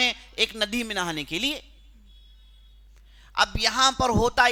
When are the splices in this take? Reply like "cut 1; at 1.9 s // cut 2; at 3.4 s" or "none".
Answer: none